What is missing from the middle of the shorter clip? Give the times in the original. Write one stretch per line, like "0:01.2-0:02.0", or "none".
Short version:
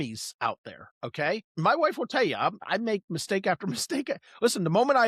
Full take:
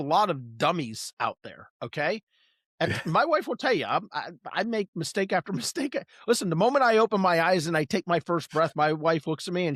0:02.3-0:03.0
0:04.1-0:04.5